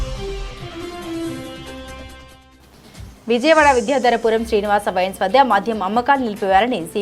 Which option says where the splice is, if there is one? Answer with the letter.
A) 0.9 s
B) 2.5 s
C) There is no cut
C